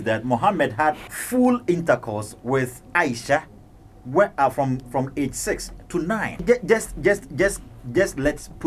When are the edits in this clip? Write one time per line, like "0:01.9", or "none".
0:01.1
0:06.4